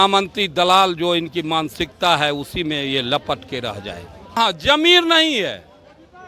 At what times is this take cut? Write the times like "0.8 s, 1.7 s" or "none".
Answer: 4.4 s